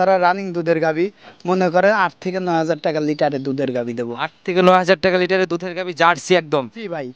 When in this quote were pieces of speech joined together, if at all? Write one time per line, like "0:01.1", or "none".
none